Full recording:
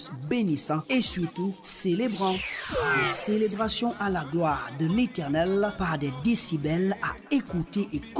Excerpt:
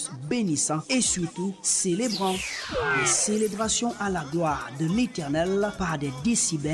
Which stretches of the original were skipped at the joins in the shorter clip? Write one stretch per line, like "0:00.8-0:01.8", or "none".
none